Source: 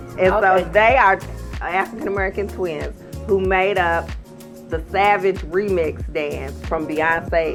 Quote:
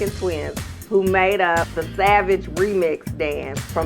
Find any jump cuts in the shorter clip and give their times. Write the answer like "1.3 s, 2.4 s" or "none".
1.8 s